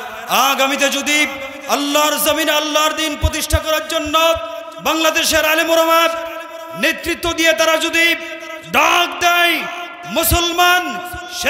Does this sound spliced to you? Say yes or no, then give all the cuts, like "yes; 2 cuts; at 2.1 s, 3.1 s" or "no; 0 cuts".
yes; 1 cut; at 4.7 s